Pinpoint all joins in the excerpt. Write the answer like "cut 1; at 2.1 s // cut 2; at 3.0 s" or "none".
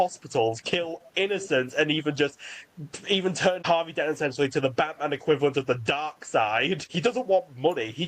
cut 1; at 3.6 s // cut 2; at 6.9 s